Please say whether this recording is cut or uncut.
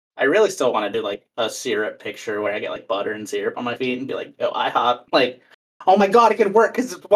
uncut